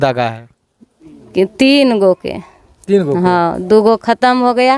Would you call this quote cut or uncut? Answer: uncut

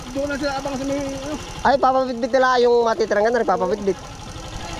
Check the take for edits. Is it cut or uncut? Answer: uncut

